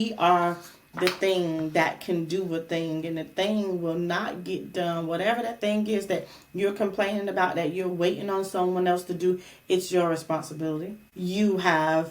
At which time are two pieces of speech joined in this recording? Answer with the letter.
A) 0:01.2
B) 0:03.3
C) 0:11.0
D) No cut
C